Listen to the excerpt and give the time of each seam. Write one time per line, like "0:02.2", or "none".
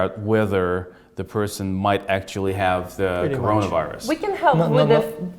none